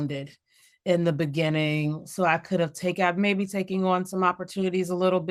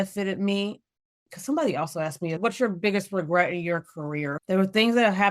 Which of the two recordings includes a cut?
second; 3 cuts; at 1.3 s, 2.4 s, 4.3 s

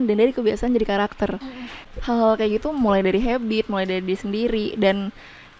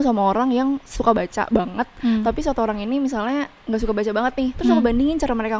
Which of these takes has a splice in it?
first; 1 cut; at 1.7 s

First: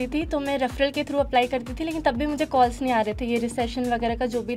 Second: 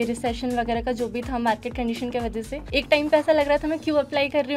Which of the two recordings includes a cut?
second; 1 cut; at 2.6 s

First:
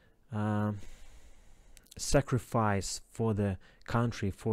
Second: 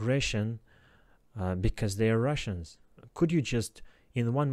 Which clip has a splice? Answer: second; 1 cut; at 3.0 s

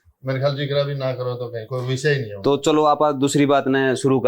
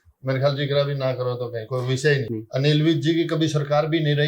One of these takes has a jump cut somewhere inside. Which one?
second; 1 cut; at 2.3 s

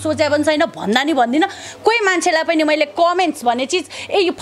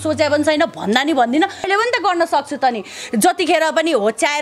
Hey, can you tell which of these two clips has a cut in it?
second; 1 cut; at 1.7 s

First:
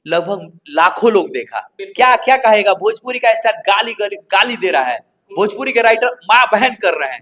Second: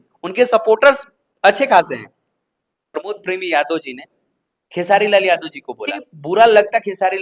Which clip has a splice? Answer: second; 2 cuts; at 3.1 s, 6.0 s

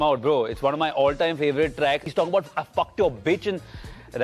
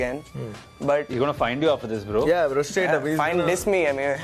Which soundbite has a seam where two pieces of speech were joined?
first; 1 cut; at 2.1 s

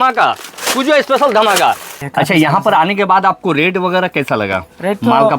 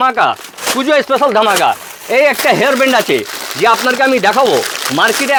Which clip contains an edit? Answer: first; 1 cut; at 2.0 s

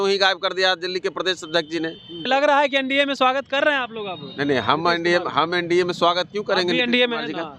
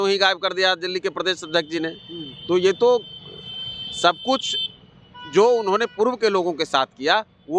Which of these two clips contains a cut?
first; 1 cut; at 2.3 s

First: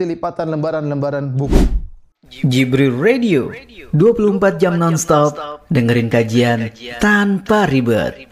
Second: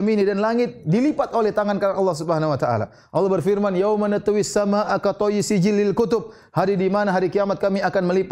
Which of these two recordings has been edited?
first; 1 cut; at 1.5 s

